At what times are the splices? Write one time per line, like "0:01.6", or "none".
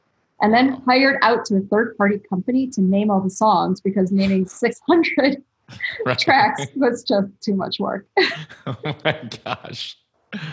none